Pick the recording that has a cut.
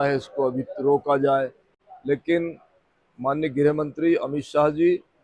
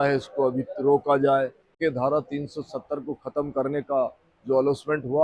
second; 1 cut; at 1.8 s

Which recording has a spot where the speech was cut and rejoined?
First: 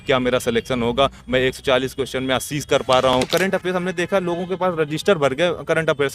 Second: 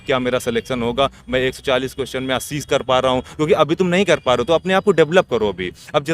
first; 1 cut; at 3.3 s

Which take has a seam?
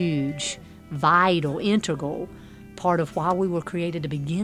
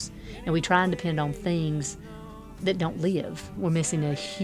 second; 1 cut; at 3.4 s

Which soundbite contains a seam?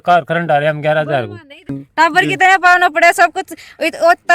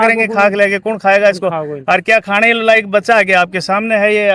first; 1 cut; at 1.8 s

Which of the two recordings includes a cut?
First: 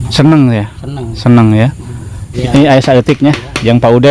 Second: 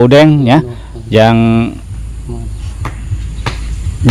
first; 1 cut; at 2.3 s

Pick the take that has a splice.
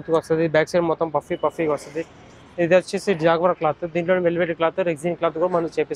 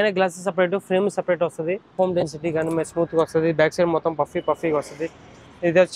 second; 1 cut; at 1.9 s

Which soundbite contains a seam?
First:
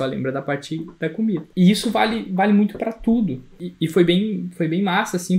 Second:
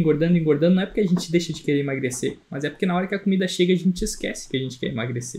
first; 2 cuts; at 1.5 s, 3.6 s

